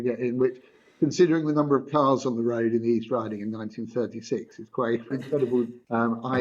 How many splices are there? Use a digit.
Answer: 1